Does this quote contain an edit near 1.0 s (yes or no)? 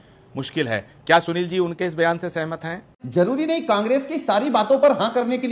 no